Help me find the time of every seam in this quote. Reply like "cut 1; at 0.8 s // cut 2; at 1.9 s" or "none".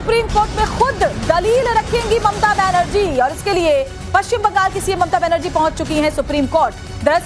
cut 1; at 5.6 s